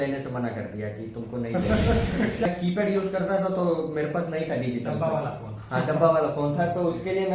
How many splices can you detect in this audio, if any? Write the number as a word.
one